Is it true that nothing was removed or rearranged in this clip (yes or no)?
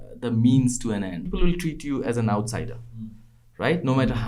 no